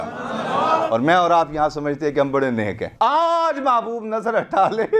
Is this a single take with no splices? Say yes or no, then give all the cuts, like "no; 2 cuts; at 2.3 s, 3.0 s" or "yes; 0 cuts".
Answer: no; 2 cuts; at 0.9 s, 2.8 s